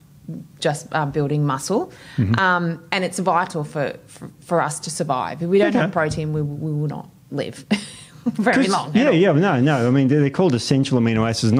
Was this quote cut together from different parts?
no; 0 cuts

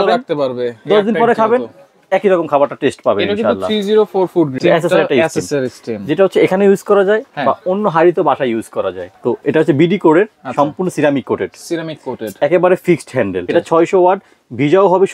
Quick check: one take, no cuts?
no; 3 cuts; at 4.5 s, 9.0 s, 13.5 s

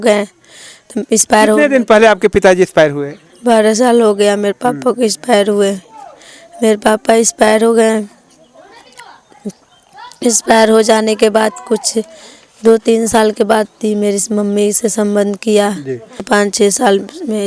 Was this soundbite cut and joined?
yes; 1 cut; at 16.2 s

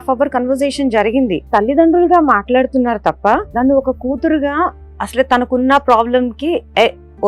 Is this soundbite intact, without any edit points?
no; 2 cuts; at 1.4 s, 3.5 s

